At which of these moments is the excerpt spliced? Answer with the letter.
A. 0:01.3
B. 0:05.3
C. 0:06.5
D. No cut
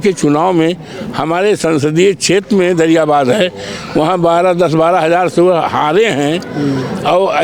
D